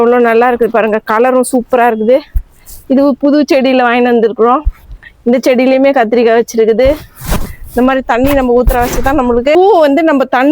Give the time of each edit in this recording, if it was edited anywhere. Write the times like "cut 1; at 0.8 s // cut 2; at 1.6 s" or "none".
cut 1; at 9.6 s

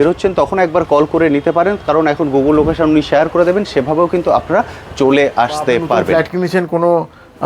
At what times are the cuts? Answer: cut 1; at 6.1 s

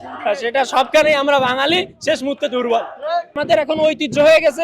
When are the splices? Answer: cut 1; at 3.3 s

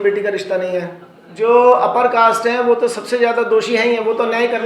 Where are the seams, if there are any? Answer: cut 1; at 1.3 s

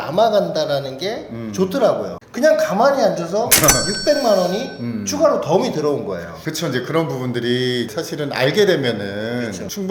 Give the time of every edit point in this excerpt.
cut 1; at 2.2 s

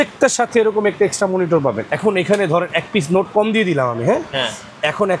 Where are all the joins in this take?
cut 1; at 1.9 s

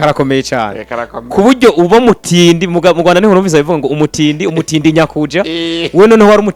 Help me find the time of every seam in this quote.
none

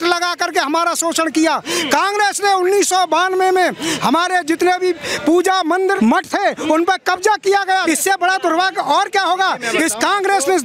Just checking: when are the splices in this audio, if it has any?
cut 1; at 6.0 s // cut 2; at 7.8 s

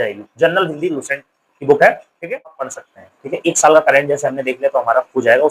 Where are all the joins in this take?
cut 1; at 2.6 s

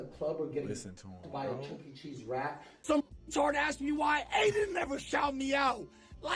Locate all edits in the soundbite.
cut 1; at 2.7 s

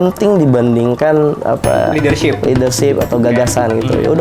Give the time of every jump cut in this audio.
none

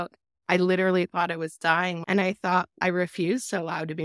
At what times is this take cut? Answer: cut 1; at 2.0 s // cut 2; at 2.8 s

